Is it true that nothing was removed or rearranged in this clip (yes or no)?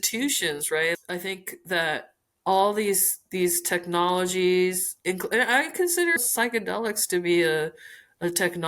no